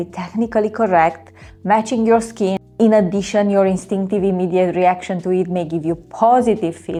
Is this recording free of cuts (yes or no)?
yes